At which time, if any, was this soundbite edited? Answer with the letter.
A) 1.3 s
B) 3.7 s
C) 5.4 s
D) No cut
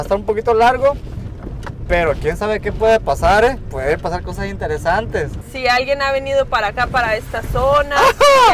C